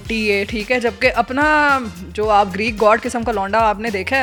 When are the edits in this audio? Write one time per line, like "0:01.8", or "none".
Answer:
none